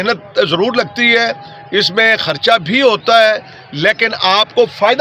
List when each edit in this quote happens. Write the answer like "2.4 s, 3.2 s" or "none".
none